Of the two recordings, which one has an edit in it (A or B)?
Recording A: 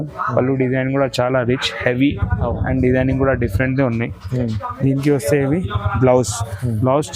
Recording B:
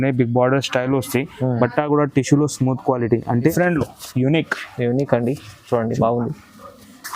B